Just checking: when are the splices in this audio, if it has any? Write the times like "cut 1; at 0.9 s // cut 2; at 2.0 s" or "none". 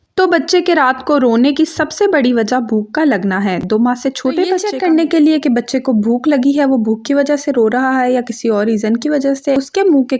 cut 1; at 4.6 s